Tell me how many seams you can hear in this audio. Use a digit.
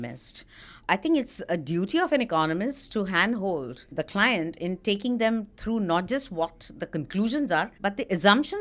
3